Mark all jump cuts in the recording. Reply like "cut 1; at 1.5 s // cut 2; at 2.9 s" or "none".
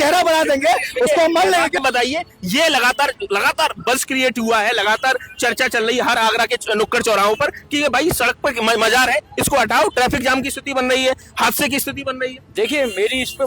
cut 1; at 1.8 s

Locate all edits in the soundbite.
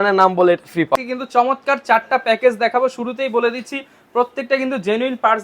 cut 1; at 0.9 s

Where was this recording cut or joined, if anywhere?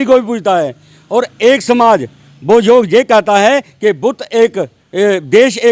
none

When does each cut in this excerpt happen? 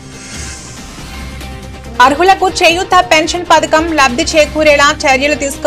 none

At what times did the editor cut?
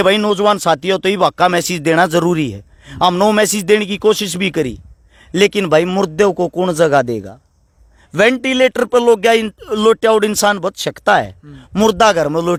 none

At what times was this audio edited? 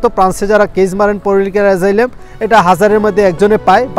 none

